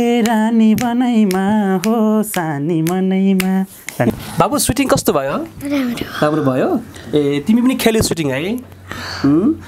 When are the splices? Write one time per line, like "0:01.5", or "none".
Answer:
0:04.1